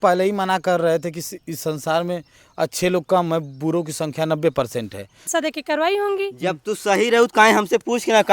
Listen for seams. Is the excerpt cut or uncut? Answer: cut